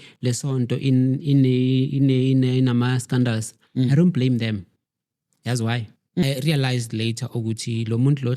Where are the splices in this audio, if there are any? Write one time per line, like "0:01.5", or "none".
0:06.2